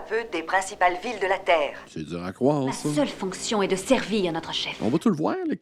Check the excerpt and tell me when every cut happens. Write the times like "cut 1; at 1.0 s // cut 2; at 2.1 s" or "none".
cut 1; at 2.9 s // cut 2; at 4.6 s